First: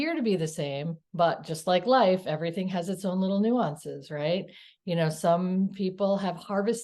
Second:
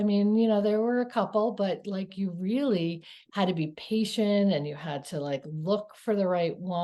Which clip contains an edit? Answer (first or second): first